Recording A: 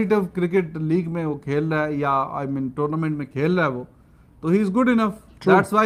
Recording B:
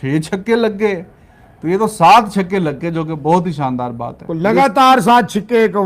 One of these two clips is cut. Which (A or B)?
B